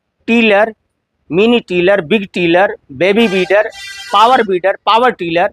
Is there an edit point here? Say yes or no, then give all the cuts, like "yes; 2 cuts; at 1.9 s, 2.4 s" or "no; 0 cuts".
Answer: no; 0 cuts